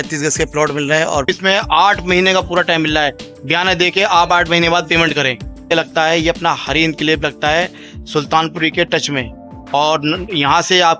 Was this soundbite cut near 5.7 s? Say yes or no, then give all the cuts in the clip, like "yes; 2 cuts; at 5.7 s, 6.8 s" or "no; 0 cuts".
yes; 2 cuts; at 1.3 s, 5.7 s